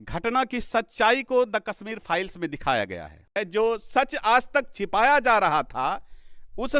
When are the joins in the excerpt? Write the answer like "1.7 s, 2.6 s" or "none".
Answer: 3.4 s